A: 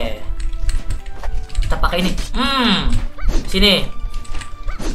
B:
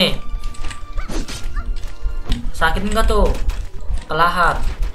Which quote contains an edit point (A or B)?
B